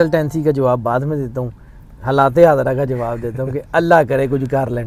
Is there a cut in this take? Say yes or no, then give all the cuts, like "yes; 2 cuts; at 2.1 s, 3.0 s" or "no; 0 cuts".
no; 0 cuts